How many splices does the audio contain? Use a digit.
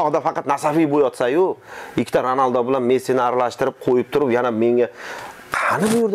0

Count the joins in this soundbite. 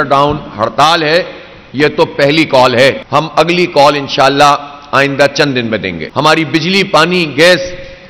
2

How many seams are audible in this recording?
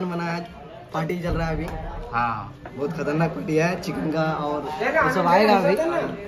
0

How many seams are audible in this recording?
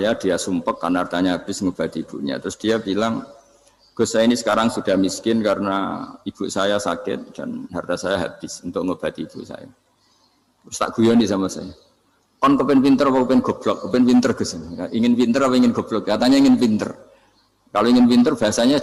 0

